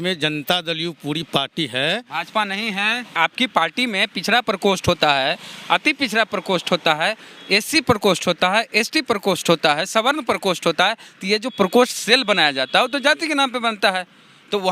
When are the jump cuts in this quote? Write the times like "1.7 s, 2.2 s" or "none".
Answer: 3.1 s